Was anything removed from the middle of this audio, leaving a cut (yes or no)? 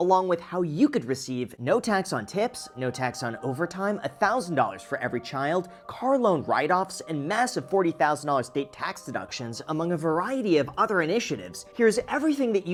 no